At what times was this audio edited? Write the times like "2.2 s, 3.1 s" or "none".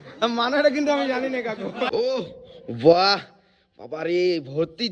1.9 s